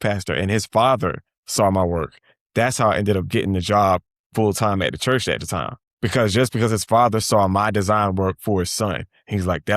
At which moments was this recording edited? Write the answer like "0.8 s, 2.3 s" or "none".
5.8 s